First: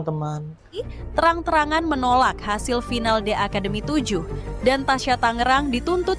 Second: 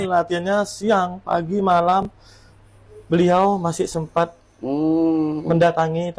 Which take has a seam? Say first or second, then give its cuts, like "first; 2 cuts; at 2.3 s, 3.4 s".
first; 1 cut; at 0.9 s